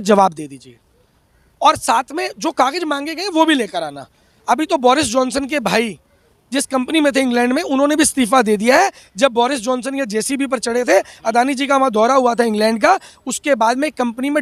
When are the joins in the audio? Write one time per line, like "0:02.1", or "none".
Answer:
none